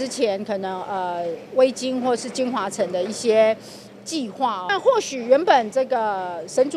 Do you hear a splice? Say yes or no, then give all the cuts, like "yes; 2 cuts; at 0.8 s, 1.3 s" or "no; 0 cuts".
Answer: yes; 1 cut; at 4.7 s